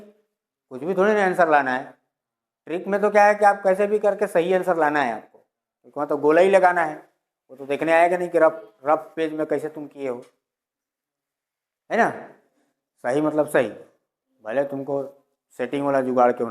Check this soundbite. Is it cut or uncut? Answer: uncut